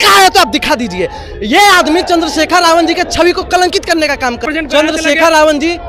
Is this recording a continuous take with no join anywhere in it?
no; 1 cut; at 4.4 s

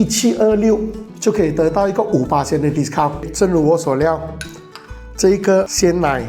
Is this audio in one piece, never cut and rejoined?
no; 2 cuts; at 1.1 s, 3.3 s

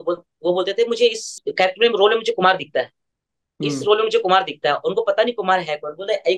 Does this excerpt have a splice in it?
yes; 1 cut; at 1.4 s

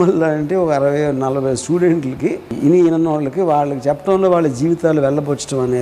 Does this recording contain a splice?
yes; 1 cut; at 2.5 s

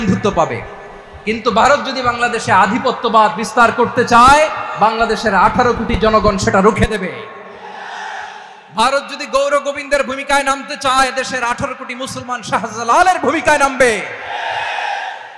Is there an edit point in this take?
no; 0 cuts

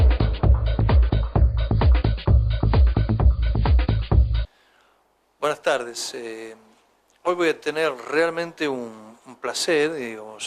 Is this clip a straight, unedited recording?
yes; 0 cuts

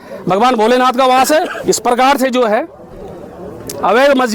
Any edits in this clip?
no; 0 cuts

